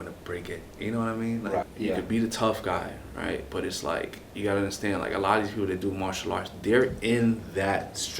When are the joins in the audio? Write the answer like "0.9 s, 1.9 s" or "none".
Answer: 1.7 s, 4.2 s

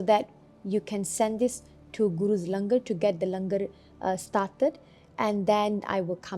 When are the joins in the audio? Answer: none

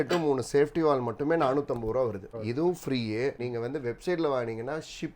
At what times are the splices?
2.3 s, 3.4 s

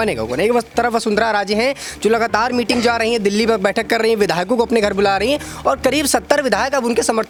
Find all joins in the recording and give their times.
none

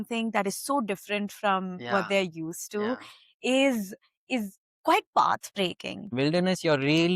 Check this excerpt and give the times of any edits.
4.6 s, 6.1 s

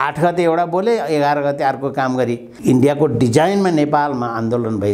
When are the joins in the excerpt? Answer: 2.5 s

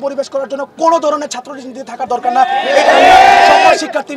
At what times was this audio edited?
none

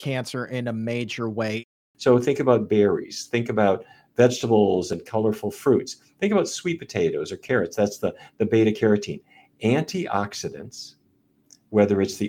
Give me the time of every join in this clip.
1.6 s

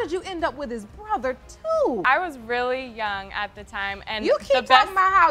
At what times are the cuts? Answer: 2.0 s

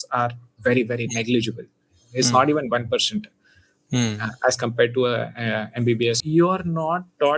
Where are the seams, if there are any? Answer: 6.2 s

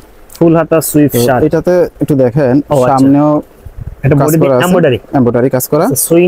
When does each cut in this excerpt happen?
none

